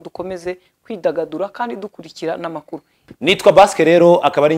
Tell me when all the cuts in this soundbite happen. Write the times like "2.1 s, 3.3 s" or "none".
3.0 s